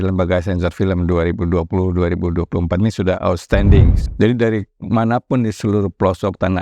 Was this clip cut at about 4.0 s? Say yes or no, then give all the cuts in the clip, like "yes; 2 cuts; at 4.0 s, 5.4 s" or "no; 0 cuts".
yes; 1 cut; at 4.0 s